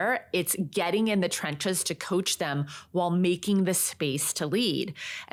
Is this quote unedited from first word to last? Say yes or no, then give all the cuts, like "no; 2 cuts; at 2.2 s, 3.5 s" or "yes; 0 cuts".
yes; 0 cuts